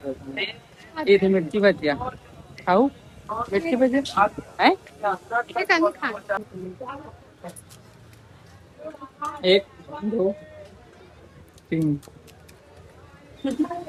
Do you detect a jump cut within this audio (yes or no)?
no